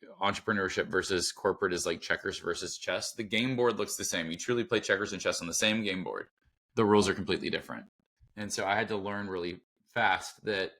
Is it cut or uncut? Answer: uncut